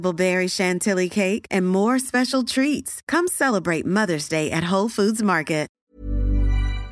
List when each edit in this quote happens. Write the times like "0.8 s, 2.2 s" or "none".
5.8 s